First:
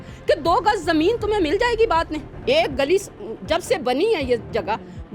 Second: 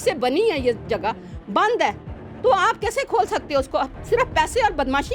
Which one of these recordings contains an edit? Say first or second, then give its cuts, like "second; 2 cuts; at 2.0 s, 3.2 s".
first; 1 cut; at 2.2 s